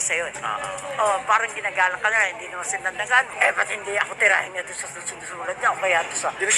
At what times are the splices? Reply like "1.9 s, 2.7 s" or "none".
3.3 s